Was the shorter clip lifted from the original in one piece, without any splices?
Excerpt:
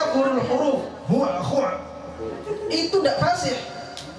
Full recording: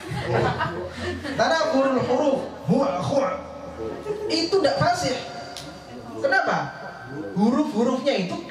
yes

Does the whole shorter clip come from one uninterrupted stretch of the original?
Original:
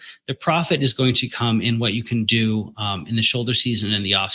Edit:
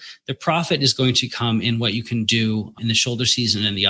no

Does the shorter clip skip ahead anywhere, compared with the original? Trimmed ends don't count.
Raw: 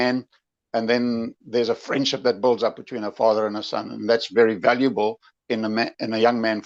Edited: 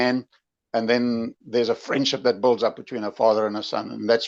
no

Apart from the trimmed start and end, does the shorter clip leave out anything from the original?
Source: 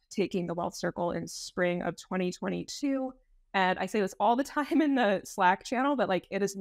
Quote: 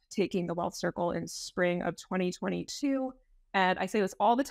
no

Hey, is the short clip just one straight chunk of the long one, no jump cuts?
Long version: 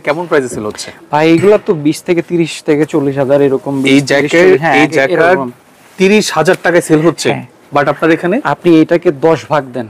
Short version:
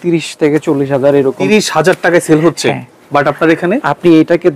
no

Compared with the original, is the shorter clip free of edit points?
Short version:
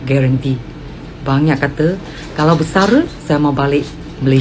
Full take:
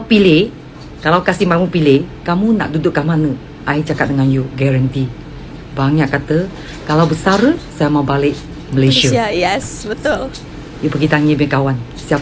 yes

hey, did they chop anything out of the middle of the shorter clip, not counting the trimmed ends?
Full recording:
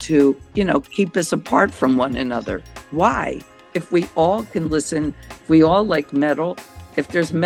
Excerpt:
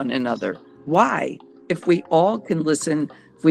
no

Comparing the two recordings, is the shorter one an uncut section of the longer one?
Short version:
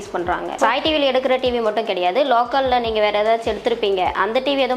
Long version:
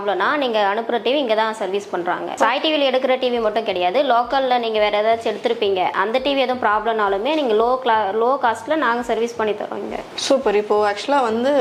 yes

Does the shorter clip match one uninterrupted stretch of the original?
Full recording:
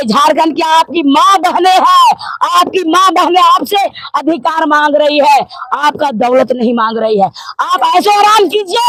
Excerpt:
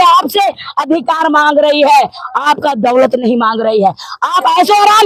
yes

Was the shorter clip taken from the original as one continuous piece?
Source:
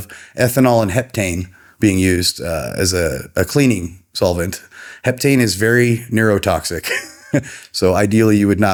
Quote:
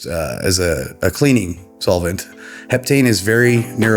yes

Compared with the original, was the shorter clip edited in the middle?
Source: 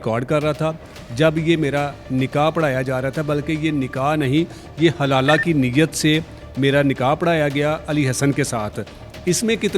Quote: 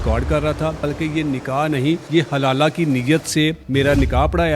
yes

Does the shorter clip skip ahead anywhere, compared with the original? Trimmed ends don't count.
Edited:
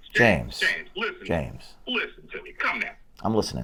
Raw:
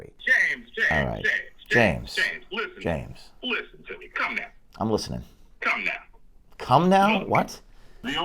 no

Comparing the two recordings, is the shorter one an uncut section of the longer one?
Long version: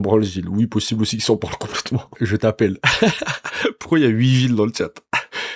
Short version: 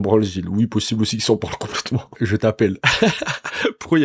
yes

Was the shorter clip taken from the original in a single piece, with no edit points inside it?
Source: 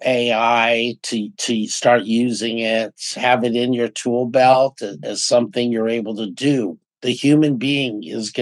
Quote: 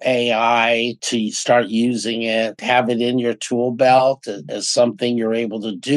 no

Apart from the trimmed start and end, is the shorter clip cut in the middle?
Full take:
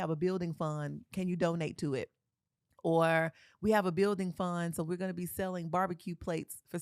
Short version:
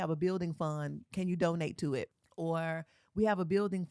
yes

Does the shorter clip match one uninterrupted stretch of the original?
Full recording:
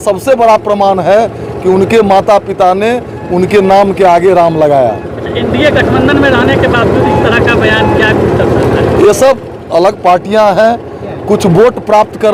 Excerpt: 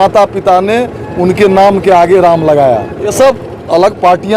no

